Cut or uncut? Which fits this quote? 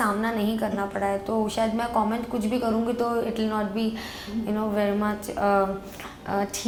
uncut